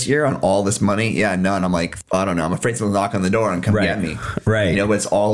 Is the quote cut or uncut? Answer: uncut